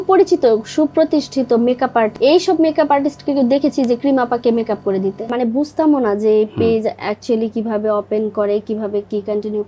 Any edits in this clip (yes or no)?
yes